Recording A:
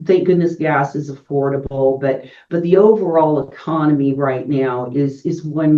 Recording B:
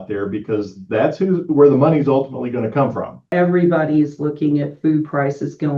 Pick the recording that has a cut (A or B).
B